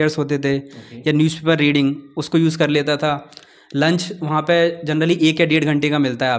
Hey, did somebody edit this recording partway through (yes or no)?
no